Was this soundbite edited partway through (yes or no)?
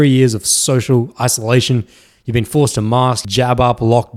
yes